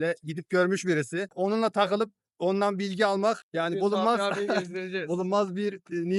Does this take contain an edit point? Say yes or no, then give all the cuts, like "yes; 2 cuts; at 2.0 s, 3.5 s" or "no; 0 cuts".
no; 0 cuts